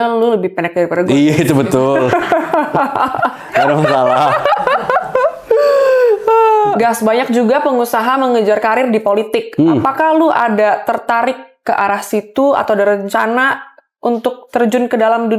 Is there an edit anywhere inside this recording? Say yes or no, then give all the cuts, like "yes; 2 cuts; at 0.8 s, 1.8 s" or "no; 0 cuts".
no; 0 cuts